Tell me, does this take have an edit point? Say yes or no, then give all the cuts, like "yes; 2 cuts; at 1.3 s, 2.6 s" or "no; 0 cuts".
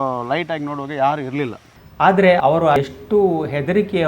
yes; 2 cuts; at 1.7 s, 2.4 s